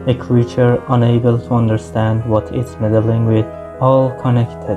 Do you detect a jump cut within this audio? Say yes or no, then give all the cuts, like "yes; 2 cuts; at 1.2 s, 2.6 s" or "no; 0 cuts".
yes; 1 cut; at 3.6 s